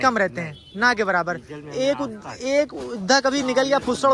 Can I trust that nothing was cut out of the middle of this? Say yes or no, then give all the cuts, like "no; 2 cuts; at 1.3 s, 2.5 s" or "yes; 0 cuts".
yes; 0 cuts